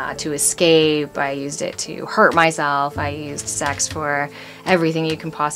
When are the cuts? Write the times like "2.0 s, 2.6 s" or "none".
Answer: none